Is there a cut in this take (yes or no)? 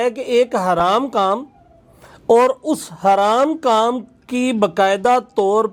no